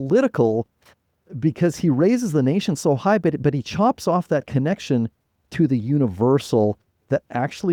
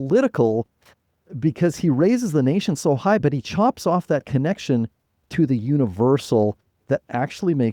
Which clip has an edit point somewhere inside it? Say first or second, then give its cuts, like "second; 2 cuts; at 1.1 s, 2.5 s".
second; 1 cut; at 3.2 s